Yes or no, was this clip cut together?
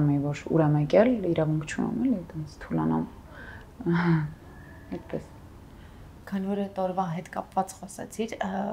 no